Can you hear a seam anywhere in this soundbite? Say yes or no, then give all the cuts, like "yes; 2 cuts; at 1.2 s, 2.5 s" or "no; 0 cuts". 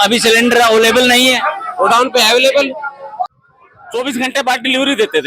yes; 1 cut; at 3.2 s